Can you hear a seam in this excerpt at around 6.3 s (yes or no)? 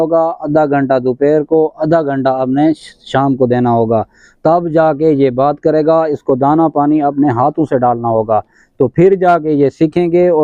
no